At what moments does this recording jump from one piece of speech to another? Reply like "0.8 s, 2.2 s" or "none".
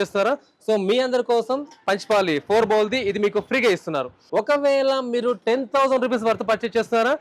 4.1 s